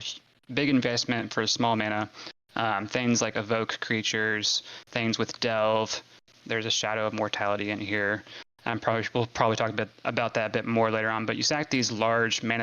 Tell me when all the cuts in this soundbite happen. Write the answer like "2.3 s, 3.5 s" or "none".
6.3 s